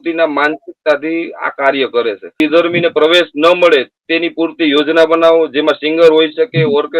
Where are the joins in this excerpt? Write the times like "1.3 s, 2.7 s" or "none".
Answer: 2.4 s